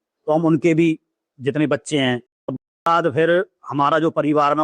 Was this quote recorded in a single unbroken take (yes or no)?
no